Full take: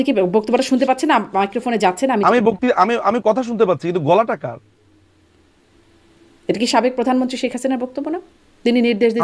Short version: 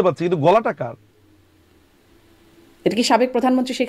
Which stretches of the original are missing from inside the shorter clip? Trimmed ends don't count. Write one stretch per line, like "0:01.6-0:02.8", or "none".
none